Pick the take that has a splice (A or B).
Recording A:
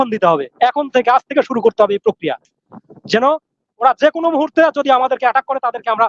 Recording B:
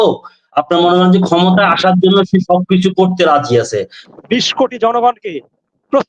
B